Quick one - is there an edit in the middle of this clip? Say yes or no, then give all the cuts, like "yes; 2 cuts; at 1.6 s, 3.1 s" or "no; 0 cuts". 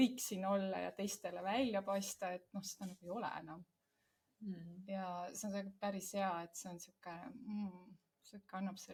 no; 0 cuts